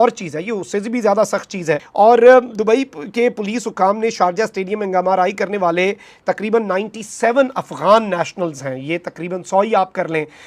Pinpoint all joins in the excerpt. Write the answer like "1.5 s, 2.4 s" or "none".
1.8 s

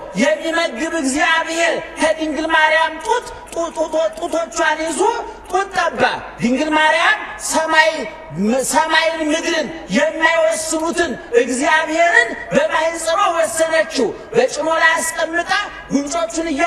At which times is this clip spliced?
none

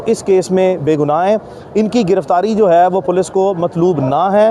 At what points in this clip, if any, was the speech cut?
none

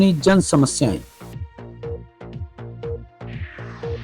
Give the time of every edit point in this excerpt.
1.1 s

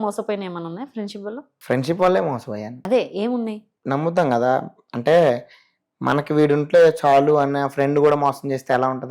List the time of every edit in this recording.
3.7 s

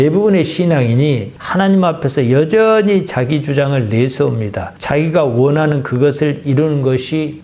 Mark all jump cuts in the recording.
1.3 s

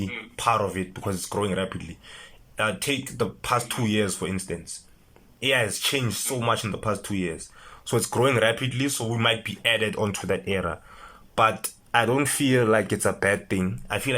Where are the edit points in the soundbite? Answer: 11.7 s

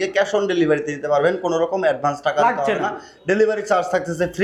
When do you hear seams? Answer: none

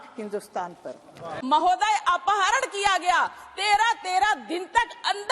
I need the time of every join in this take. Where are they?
1.3 s

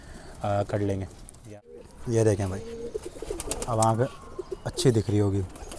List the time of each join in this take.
1.4 s

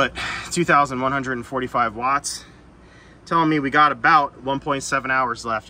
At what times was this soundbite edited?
none

